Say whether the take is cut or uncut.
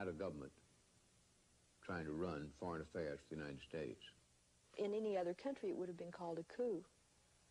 uncut